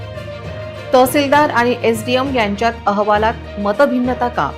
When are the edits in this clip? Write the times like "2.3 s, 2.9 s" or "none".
0.9 s